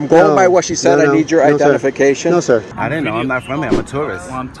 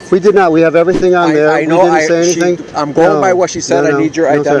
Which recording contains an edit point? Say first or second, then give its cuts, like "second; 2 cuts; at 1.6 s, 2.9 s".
first; 1 cut; at 2.8 s